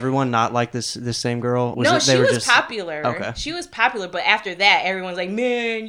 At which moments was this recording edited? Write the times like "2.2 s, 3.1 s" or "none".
1.7 s